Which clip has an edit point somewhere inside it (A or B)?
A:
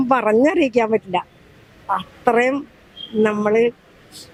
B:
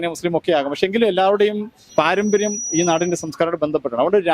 B